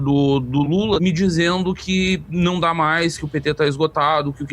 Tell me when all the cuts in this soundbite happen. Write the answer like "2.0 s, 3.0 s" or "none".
1.0 s